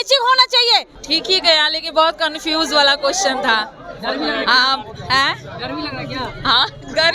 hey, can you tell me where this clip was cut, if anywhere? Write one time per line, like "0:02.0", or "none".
0:00.9

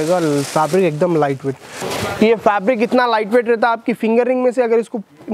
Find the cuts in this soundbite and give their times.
0:01.8

